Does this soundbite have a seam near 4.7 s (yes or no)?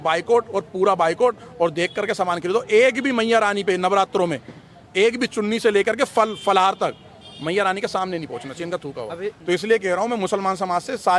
no